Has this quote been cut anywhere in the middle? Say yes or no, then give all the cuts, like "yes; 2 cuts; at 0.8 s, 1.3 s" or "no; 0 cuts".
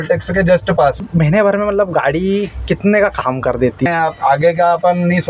yes; 2 cuts; at 1.1 s, 3.9 s